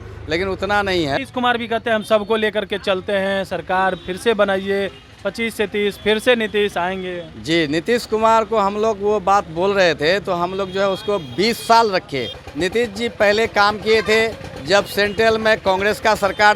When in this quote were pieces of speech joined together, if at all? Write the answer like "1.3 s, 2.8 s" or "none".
1.2 s, 12.4 s